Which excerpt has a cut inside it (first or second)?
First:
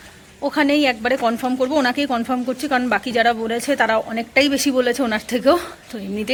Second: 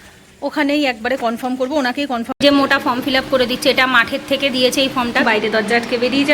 second